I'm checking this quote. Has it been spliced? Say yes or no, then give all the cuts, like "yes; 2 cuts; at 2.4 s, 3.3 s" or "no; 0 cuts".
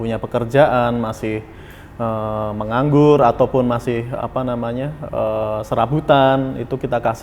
no; 0 cuts